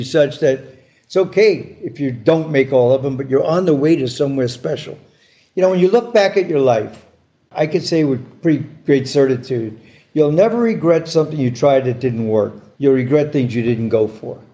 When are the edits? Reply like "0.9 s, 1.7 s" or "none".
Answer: none